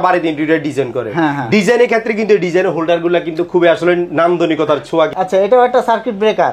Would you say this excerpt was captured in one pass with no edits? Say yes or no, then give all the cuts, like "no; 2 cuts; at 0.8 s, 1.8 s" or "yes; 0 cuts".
no; 1 cut; at 5.1 s